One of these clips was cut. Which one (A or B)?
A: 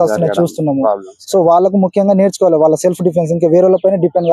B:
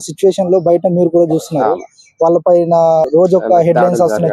B